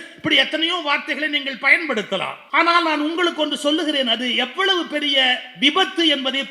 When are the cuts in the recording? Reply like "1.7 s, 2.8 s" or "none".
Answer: 2.4 s